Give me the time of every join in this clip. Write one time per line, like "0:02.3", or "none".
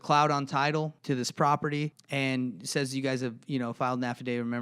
0:01.0
0:02.0